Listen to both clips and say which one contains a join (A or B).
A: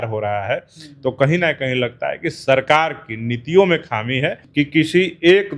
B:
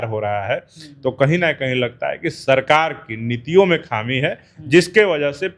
A